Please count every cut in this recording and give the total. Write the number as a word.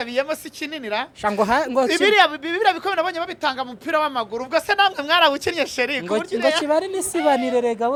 zero